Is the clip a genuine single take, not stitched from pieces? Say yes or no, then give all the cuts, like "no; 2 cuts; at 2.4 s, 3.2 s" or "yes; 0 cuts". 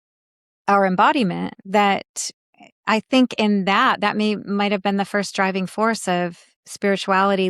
no; 1 cut; at 1.5 s